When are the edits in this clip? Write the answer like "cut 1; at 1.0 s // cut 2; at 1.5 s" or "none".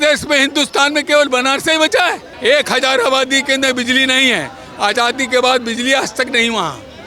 cut 1; at 2.3 s